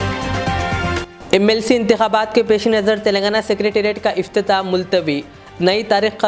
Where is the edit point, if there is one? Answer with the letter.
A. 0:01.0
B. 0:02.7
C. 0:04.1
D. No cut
A